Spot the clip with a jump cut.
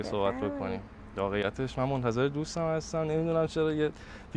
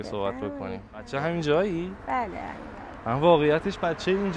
second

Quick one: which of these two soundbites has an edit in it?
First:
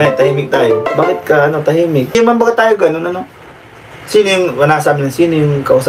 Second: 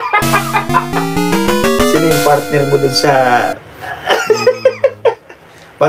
first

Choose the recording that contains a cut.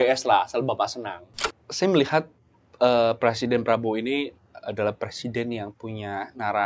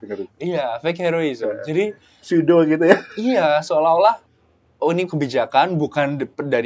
first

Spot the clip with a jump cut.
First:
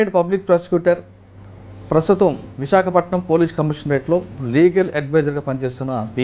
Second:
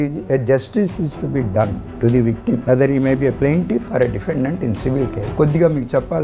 second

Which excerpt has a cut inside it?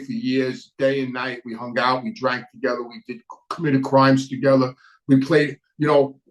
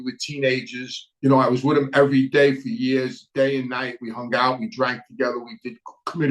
second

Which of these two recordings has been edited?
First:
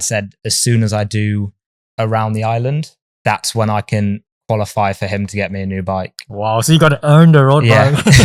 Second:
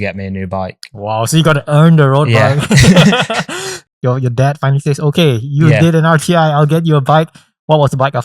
second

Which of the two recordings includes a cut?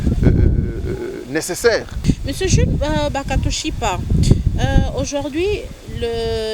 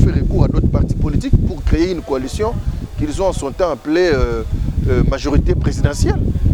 first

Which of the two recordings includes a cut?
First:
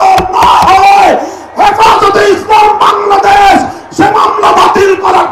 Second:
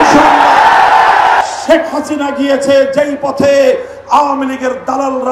second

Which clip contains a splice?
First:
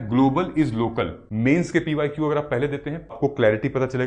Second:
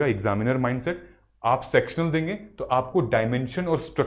first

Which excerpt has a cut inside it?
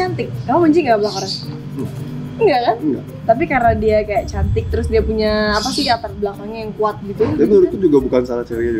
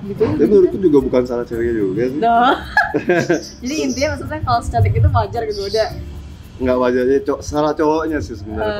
first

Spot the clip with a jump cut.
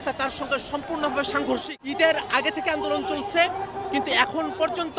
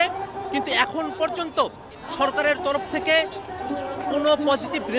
first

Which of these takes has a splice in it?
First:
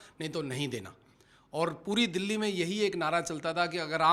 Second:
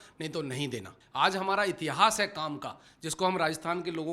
second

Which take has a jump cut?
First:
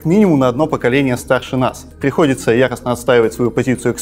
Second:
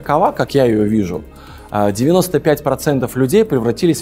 first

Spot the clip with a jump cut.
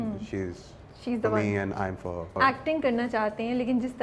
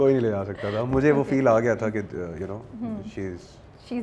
first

